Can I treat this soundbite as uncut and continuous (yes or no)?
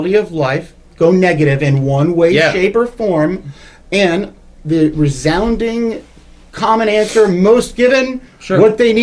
yes